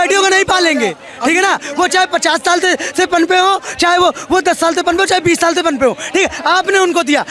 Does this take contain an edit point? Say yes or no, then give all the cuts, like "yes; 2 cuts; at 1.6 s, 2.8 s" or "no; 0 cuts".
no; 0 cuts